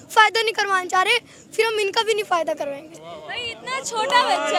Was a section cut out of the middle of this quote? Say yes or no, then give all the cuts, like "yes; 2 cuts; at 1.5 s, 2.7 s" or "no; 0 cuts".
no; 0 cuts